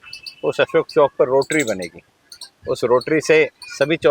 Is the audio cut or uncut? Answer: uncut